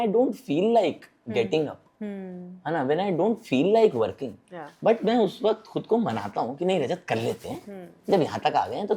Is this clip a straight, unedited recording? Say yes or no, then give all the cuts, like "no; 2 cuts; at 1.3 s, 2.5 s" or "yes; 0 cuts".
yes; 0 cuts